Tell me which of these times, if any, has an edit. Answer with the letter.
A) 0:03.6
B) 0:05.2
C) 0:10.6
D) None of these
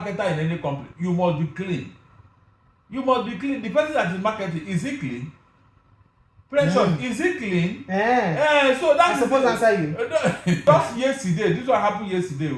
C